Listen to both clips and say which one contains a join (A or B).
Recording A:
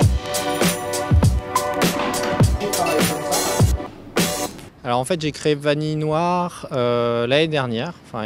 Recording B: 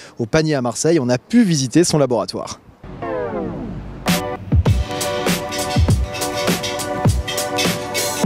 B